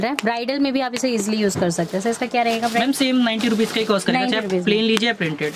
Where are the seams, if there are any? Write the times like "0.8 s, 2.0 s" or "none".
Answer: none